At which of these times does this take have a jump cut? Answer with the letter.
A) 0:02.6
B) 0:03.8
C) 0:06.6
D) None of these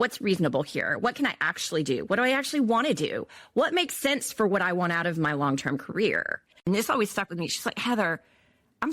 C